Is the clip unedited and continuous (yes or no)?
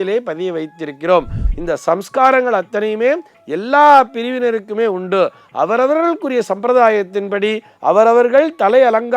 no